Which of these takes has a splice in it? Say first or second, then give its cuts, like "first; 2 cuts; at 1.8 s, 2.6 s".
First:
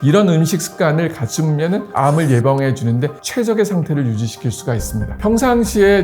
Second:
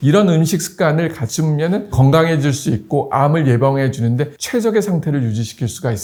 first; 2 cuts; at 1.9 s, 5.1 s